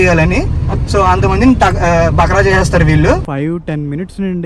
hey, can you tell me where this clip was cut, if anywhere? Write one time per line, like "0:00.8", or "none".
0:03.2